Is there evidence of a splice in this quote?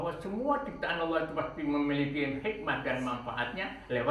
no; 0 cuts

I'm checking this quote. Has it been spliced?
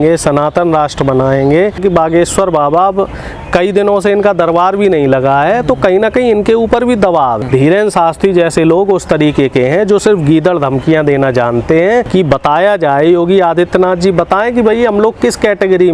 yes; 3 cuts; at 1.8 s, 7.4 s, 12.1 s

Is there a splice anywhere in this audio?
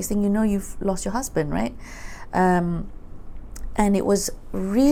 no; 0 cuts

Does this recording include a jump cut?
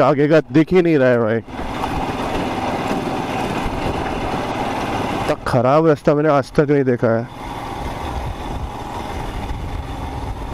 no; 0 cuts

